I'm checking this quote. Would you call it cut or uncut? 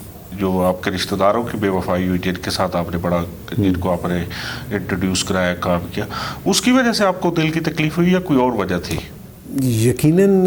uncut